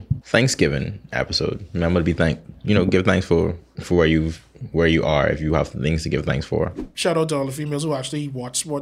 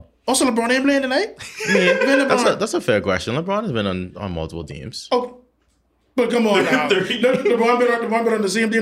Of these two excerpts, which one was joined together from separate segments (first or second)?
first